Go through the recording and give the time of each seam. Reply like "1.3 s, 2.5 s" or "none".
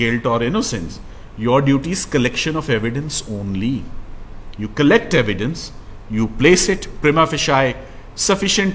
none